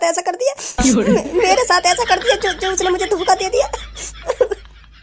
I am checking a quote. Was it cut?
no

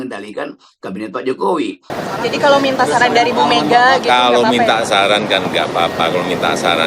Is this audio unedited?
no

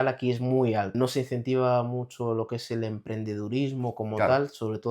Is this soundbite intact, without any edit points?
no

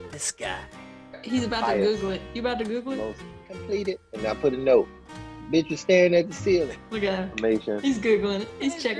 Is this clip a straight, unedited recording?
yes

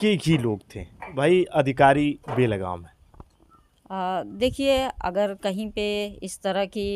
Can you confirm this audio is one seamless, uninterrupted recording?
no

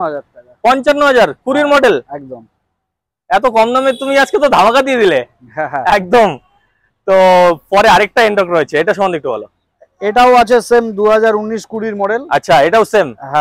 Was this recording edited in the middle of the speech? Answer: no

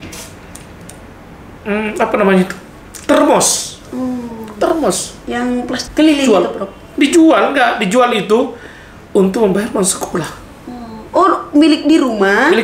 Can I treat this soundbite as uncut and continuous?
no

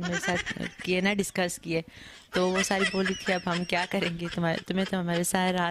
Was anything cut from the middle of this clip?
no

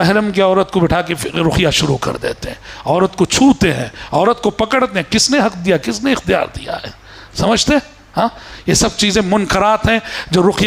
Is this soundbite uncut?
yes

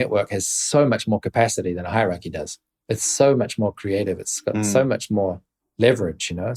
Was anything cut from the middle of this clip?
no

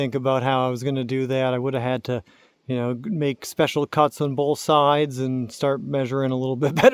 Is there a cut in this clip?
no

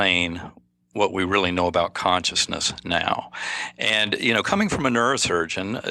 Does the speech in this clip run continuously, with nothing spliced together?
yes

